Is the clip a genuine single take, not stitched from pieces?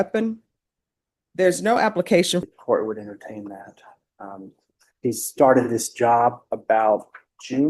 no; 1 cut; at 2.4 s

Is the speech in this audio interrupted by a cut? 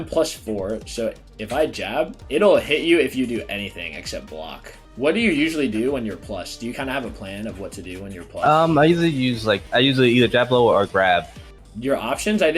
yes; 3 cuts; at 4.8 s, 9.6 s, 11.4 s

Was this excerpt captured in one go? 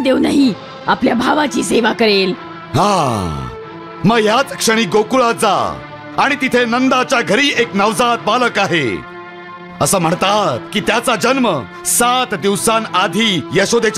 yes; 0 cuts

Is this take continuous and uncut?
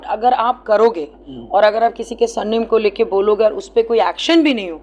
yes; 0 cuts

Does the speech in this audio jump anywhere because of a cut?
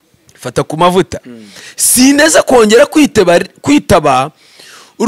no; 0 cuts

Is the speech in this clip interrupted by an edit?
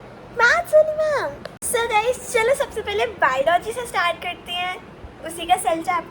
yes; 1 cut; at 1.4 s

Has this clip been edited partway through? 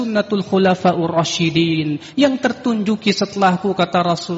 no; 0 cuts

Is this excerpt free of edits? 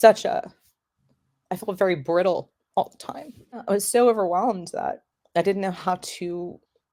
yes; 0 cuts

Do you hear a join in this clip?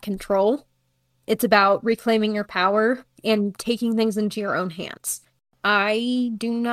yes; 1 cut; at 5.5 s

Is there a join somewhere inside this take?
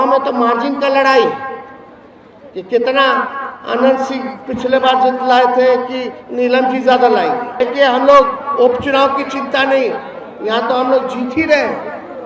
yes; 1 cut; at 7.6 s

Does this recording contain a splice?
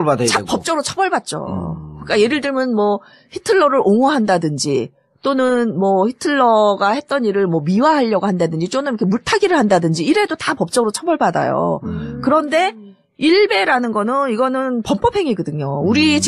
yes; 1 cut; at 5.3 s

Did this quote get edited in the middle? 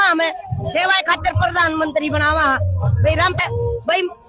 yes; 1 cut; at 3.4 s

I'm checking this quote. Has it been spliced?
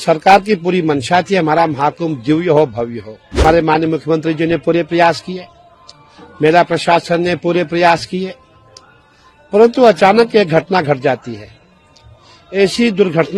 yes; 1 cut; at 3.4 s

